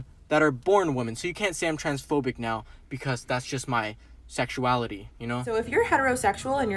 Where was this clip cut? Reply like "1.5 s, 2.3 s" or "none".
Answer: 5.4 s

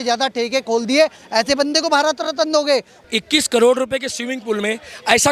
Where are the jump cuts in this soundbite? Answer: 3.0 s

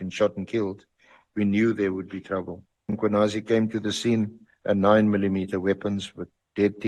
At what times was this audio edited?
3.0 s, 4.5 s

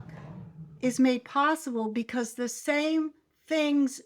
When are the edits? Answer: none

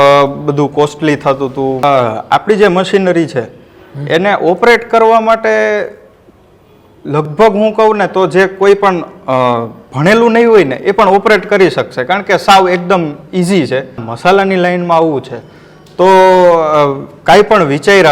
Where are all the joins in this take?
1.8 s, 14.1 s

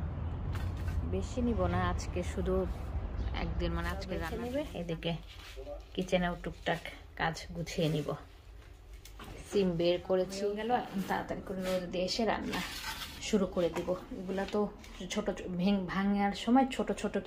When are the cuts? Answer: 4.2 s, 10.4 s

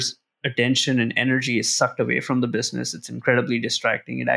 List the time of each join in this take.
none

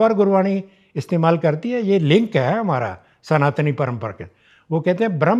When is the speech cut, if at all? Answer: none

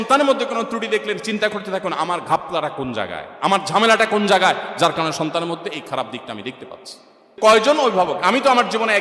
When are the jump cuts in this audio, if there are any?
7.3 s

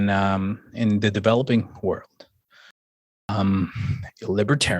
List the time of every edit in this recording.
3.1 s

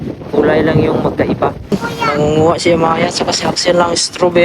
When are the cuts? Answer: 1.7 s

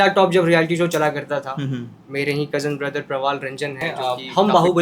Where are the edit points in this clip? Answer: 3.8 s

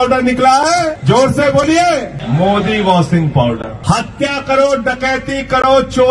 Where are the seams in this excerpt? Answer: 1.0 s, 2.2 s, 3.7 s

